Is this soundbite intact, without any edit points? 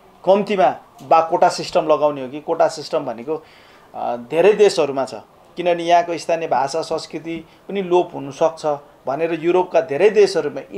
yes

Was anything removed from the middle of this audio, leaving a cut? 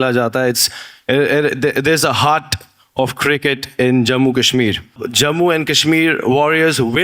yes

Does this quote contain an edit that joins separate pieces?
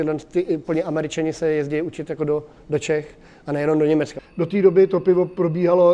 yes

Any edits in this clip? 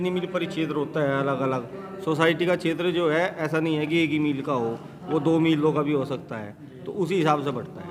no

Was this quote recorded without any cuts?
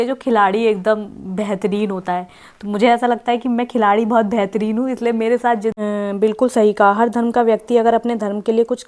no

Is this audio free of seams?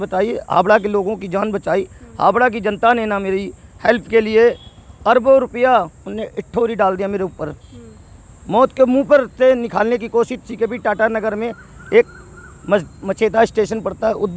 yes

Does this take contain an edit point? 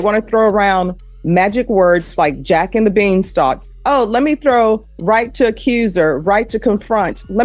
no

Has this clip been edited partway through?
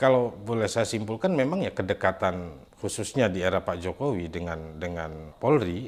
no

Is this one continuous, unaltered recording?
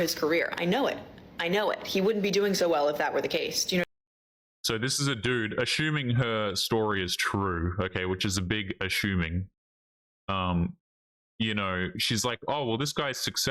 yes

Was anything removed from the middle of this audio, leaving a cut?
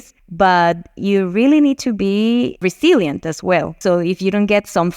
yes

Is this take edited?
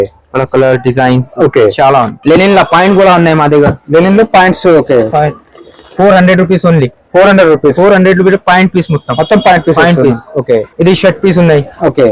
yes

